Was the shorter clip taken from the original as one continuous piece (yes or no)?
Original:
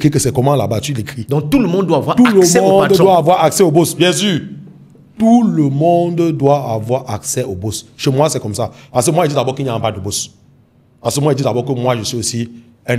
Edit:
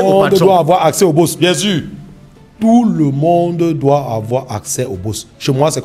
yes